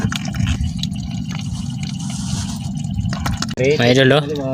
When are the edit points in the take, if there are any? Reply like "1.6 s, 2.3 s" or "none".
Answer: 3.6 s

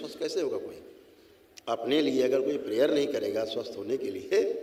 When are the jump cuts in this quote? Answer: none

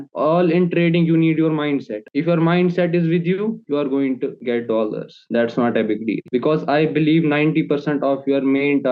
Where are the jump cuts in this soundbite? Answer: none

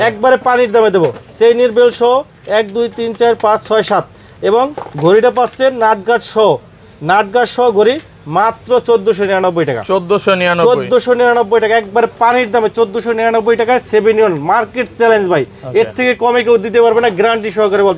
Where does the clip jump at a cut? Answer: none

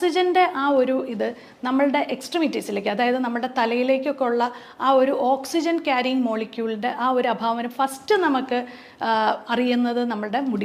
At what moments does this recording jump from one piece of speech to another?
none

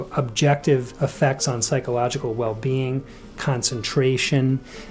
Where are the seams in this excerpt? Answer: 0.9 s

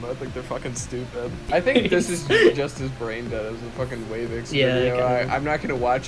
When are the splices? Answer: 1.5 s

